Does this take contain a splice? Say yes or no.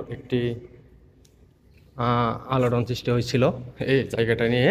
no